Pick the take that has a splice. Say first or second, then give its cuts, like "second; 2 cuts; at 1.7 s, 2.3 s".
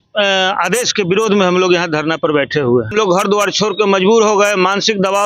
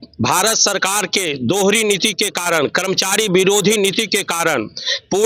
first; 1 cut; at 2.9 s